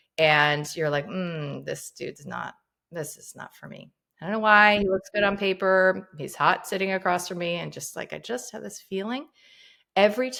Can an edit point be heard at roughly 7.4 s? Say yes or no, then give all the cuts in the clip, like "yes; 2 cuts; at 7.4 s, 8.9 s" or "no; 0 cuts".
no; 0 cuts